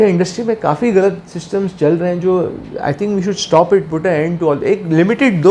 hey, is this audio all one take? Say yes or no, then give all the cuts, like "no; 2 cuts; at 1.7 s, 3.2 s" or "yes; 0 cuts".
yes; 0 cuts